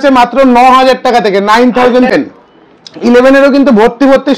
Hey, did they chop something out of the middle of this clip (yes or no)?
yes